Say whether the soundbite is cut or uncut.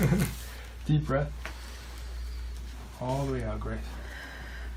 cut